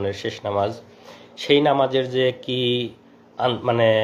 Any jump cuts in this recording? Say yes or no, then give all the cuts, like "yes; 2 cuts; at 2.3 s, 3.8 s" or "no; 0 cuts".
no; 0 cuts